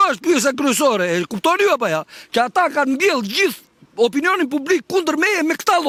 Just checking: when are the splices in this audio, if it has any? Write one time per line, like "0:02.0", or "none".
none